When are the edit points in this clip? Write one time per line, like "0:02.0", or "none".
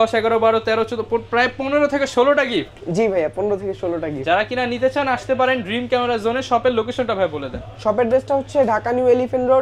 none

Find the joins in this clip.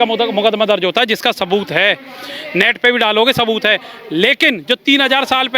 none

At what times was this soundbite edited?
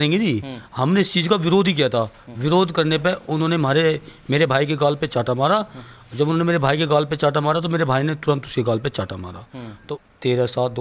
0:09.7

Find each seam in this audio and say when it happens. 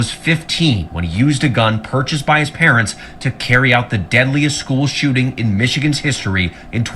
0:04.2

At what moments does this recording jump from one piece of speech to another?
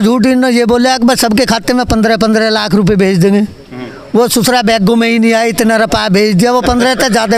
none

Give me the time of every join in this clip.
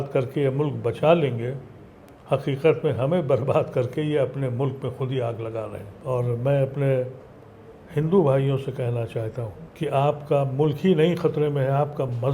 0:05.9
0:09.6

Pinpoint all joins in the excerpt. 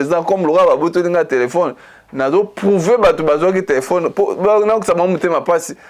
none

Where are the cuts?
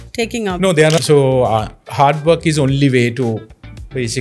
0:01.0

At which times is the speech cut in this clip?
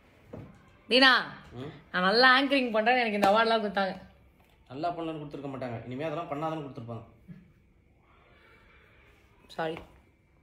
0:07.0
0:09.0

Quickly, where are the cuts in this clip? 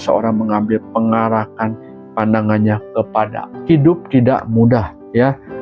0:03.5

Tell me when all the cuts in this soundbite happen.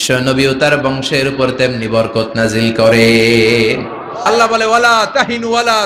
0:04.3

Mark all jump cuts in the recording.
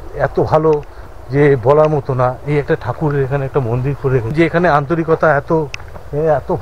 0:04.3

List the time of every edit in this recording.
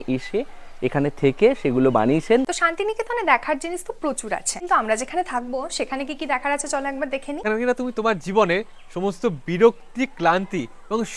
0:02.5
0:04.5
0:07.3

